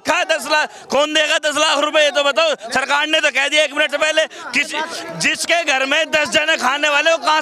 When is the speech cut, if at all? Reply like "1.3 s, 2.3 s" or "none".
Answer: none